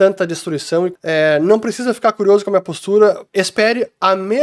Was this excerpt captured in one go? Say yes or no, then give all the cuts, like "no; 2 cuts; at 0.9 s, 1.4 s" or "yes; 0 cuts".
no; 2 cuts; at 1.0 s, 3.2 s